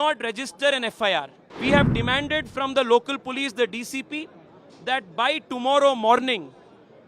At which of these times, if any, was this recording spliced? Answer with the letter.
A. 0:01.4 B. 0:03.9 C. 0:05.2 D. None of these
A